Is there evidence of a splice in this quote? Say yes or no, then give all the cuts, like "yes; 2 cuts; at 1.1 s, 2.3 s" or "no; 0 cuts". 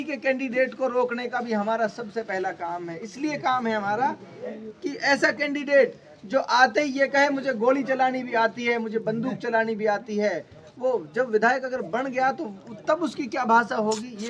no; 0 cuts